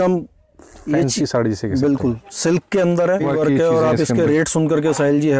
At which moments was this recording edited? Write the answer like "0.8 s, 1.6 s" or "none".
3.2 s